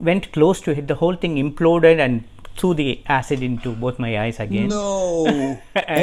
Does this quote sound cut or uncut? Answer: uncut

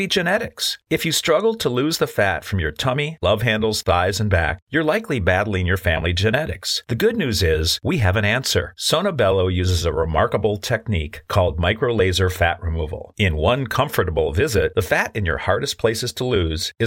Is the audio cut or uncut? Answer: uncut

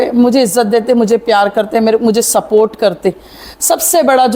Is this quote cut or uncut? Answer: uncut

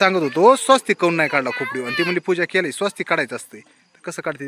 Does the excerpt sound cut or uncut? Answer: uncut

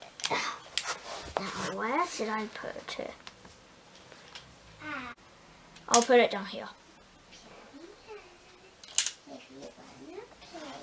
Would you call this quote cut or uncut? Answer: cut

